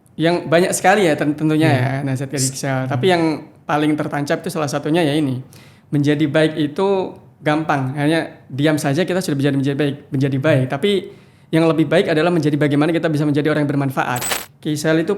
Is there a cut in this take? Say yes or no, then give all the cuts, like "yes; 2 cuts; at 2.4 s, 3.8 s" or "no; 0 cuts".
yes; 1 cut; at 14.3 s